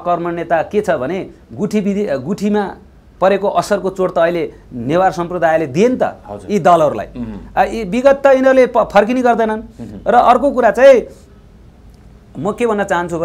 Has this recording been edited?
no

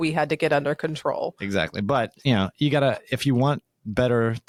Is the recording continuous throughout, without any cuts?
yes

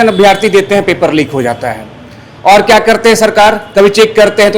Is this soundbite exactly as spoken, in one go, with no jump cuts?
yes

